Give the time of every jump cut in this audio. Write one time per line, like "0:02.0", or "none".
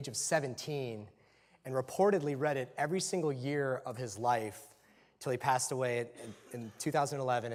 none